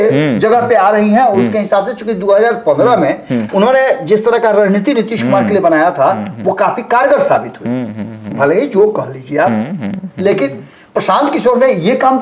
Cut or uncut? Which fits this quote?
uncut